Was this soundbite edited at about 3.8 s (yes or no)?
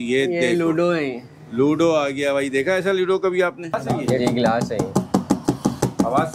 yes